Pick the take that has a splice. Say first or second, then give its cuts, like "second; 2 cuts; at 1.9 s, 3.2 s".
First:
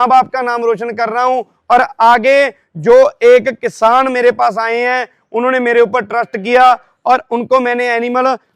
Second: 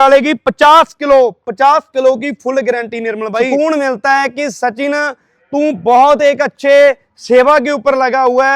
second; 1 cut; at 3.5 s